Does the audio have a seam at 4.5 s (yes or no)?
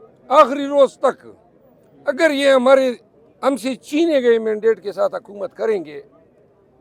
no